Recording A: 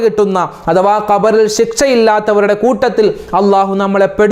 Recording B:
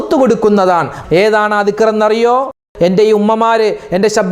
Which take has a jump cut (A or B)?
B